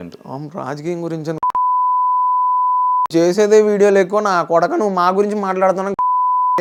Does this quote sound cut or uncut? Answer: uncut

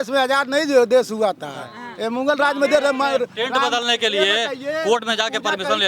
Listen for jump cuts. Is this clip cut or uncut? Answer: uncut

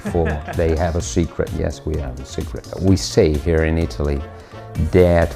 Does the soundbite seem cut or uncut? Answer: uncut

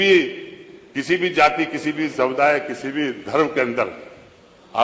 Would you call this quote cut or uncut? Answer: uncut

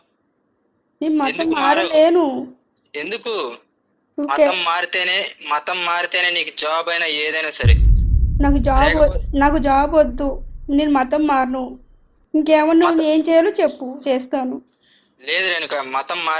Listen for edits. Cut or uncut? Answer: uncut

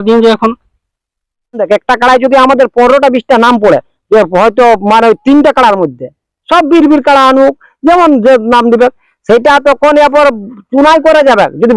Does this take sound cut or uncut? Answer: cut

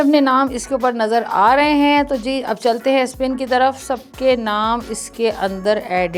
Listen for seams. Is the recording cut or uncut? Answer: uncut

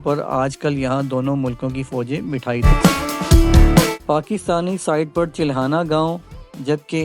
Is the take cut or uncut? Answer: cut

